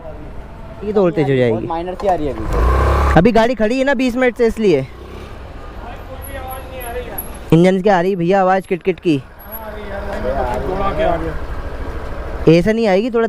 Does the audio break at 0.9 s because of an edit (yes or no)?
yes